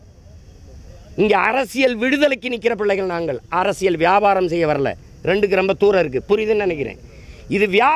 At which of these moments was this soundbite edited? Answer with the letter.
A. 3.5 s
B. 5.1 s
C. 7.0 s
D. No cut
D